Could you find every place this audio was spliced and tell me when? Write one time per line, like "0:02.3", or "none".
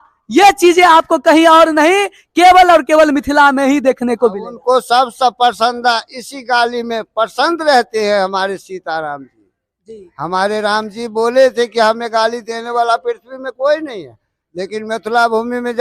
none